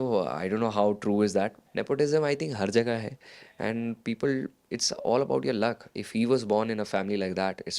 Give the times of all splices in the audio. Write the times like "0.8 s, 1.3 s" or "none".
1.6 s

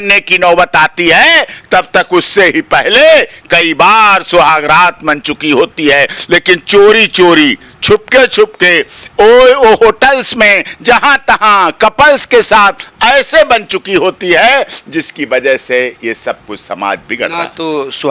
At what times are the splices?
none

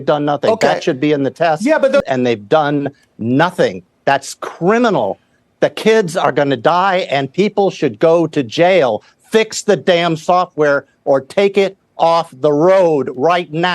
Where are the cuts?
2.1 s

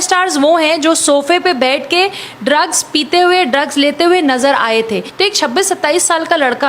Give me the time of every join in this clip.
5.1 s

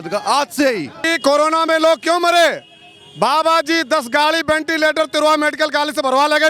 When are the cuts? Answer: 1.1 s

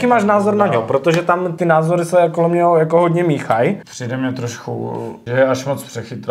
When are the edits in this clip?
1.5 s, 3.9 s, 5.2 s

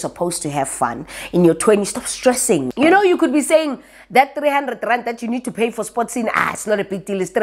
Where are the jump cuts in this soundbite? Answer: 2.7 s

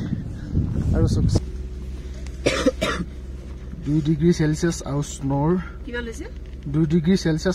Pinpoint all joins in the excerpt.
1.4 s

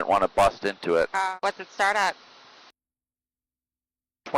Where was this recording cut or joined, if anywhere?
1.3 s

